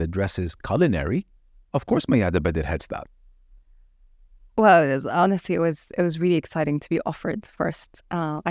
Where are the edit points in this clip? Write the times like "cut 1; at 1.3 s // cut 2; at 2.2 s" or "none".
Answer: none

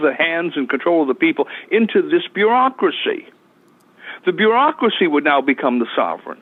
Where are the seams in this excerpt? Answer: none

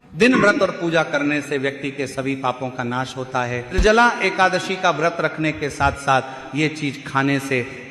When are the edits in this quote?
cut 1; at 3.8 s

